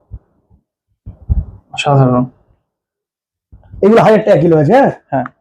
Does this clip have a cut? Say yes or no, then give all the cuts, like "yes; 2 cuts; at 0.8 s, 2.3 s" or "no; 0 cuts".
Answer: no; 0 cuts